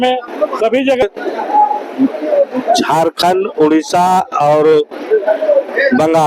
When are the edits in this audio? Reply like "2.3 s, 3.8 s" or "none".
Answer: 1.0 s